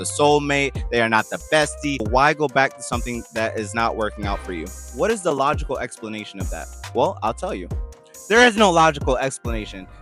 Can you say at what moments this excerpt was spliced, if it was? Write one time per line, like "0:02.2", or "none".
0:02.1